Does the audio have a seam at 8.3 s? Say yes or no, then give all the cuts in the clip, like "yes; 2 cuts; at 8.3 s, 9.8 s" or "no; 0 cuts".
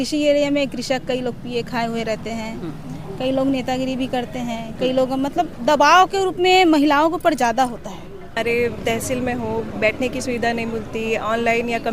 yes; 1 cut; at 8.3 s